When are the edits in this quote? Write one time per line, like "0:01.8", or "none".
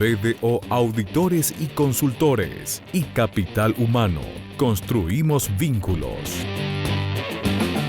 0:06.4